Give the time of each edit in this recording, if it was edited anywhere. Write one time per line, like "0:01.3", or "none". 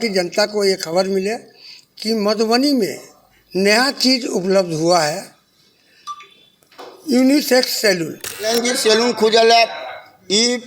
0:08.5

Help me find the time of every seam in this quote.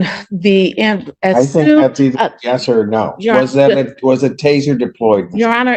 none

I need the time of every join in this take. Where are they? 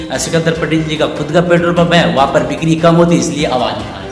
none

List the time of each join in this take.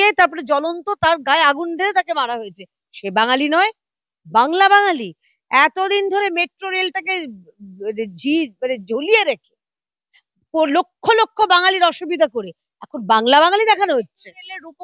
none

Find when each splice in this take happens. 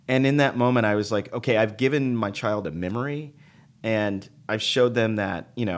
none

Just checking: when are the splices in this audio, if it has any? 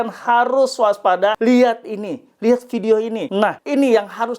0:01.4
0:03.5

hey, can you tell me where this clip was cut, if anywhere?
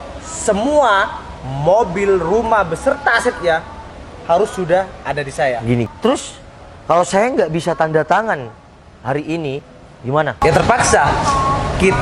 0:05.9

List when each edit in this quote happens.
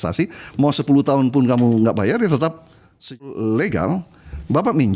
0:03.1

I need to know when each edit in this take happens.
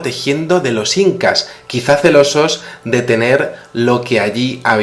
0:01.2

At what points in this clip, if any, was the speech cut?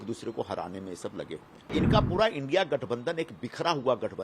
0:01.7

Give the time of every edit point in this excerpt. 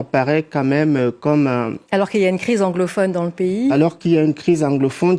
none

